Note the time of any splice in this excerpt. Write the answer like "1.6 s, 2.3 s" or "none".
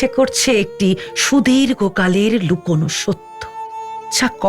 3.5 s